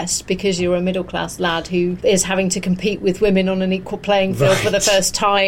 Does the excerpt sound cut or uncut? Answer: cut